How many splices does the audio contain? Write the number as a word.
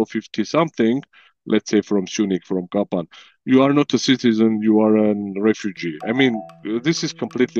one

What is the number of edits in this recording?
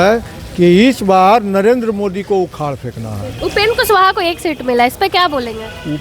one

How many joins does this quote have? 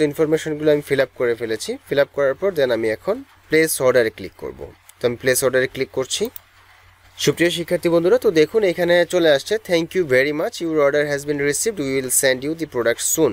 zero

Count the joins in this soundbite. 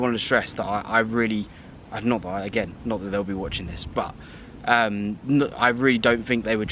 one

